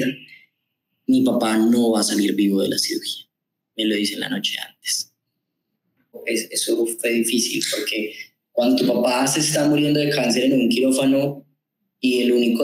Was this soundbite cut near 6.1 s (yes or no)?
yes